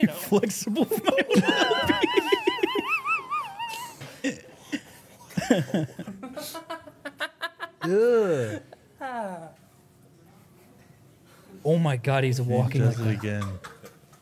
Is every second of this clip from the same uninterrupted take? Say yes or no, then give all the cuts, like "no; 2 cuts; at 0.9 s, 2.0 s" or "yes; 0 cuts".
yes; 0 cuts